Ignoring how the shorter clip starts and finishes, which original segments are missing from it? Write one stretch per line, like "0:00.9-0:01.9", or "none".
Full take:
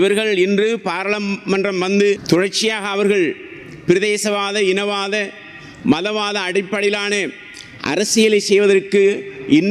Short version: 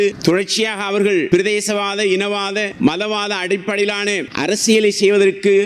0:03.3-0:03.8
0:05.3-0:05.8
0:07.3-0:07.8

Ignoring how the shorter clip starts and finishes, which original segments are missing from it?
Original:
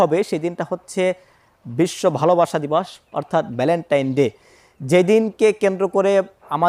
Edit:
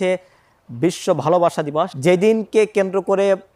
0:02.9-0:04.8

